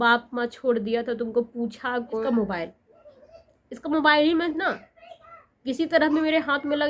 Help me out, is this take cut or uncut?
cut